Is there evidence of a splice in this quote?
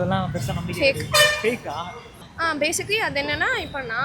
yes; 1 cut; at 2.2 s

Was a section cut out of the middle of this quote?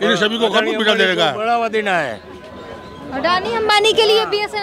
no; 0 cuts

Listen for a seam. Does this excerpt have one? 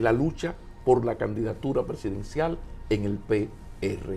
no; 0 cuts

